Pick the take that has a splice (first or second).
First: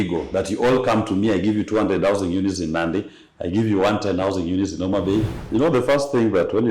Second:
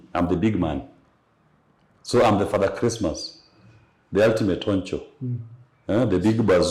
first